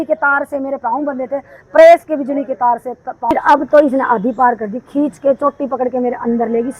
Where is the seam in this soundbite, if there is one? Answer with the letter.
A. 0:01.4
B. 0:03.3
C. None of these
B